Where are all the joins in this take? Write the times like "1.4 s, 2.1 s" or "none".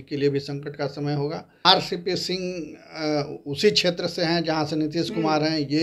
1.6 s

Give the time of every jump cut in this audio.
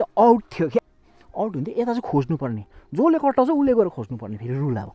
0.9 s

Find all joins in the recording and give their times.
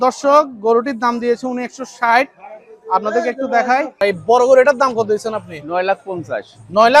4.0 s

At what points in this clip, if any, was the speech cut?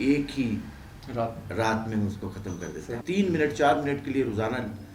3.0 s

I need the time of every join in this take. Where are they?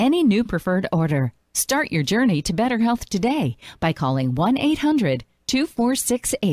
none

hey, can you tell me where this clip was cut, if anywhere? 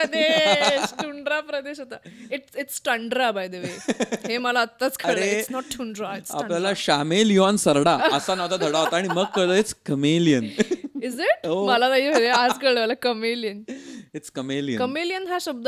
none

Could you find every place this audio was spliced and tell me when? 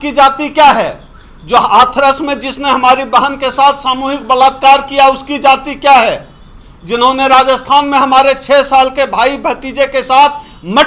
none

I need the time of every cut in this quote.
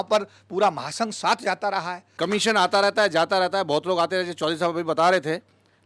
2.0 s

